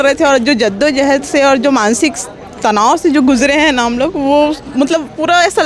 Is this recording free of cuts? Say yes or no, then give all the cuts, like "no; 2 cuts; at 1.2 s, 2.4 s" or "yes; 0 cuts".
yes; 0 cuts